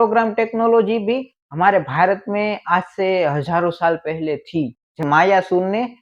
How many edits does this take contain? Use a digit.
1